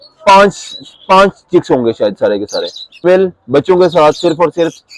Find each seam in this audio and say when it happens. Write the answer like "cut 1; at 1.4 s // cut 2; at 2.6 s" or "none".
cut 1; at 3.0 s